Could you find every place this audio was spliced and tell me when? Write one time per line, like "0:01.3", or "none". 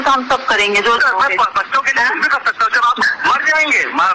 0:01.0
0:03.0